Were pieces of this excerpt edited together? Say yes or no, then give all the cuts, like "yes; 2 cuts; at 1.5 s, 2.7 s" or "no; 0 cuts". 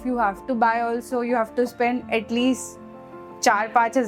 no; 0 cuts